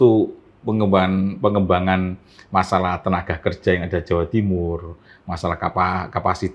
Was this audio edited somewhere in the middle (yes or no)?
no